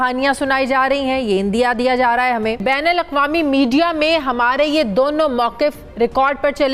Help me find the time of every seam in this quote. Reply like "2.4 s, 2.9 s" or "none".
2.6 s